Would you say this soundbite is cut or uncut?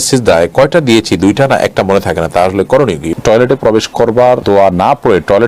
cut